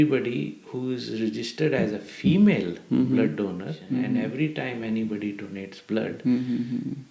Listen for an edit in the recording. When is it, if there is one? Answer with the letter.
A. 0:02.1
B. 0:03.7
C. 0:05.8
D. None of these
B